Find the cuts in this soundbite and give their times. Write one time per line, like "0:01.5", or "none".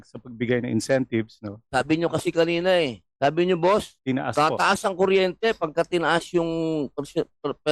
0:03.0
0:03.9